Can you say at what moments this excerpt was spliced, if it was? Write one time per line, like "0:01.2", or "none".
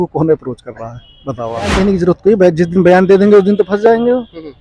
0:01.7